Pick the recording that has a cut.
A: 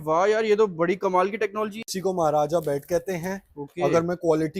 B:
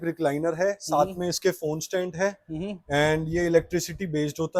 A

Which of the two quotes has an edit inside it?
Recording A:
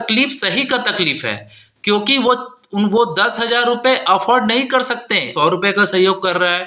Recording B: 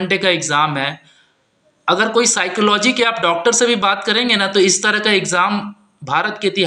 A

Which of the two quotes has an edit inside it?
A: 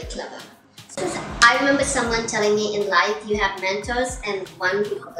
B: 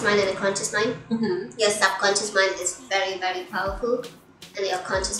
A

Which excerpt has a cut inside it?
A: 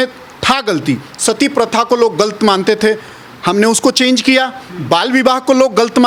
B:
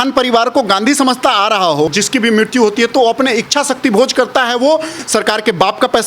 B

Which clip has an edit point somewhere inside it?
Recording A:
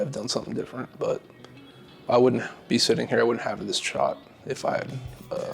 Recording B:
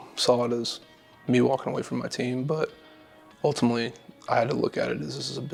A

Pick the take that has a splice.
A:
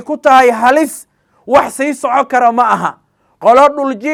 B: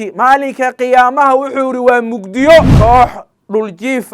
B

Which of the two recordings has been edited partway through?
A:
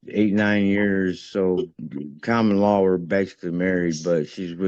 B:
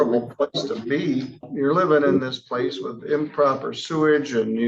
B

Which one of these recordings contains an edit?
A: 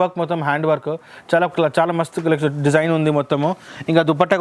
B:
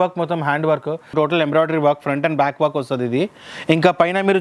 B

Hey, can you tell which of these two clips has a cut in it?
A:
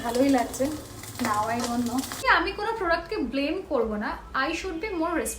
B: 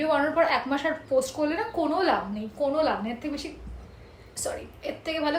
A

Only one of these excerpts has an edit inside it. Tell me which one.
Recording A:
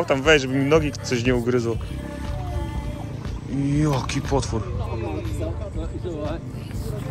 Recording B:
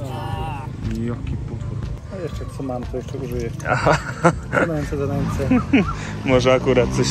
B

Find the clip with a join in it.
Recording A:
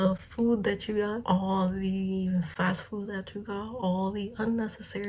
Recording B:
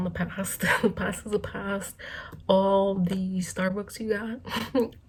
A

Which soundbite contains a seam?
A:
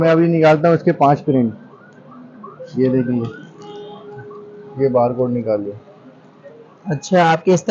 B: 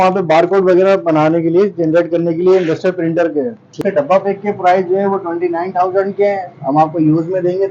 B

